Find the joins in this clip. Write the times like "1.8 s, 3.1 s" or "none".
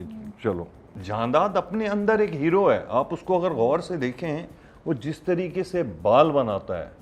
0.9 s